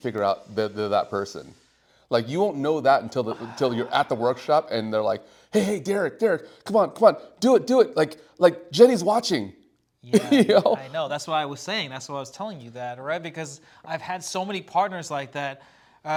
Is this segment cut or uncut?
uncut